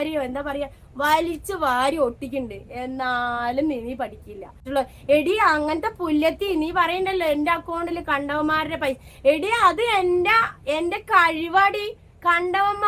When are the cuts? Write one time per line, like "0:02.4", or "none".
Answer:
0:04.6